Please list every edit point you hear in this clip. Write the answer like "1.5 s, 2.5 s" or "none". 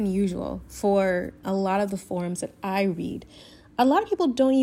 none